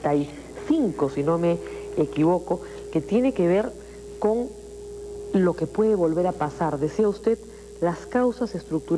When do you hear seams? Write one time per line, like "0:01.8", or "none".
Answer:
0:02.9

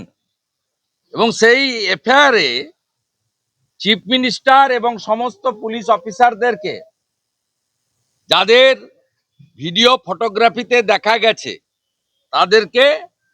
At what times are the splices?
none

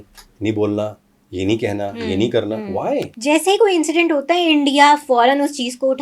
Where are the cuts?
0:03.1

